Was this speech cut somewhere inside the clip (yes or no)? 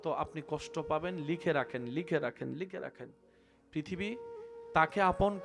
no